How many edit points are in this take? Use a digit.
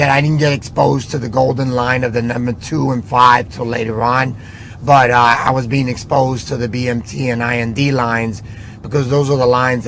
0